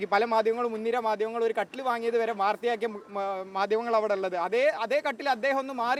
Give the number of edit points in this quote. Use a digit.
0